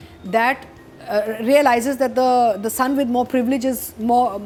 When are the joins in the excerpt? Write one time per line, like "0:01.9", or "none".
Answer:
none